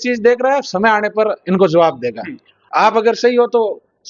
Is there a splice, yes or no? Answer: yes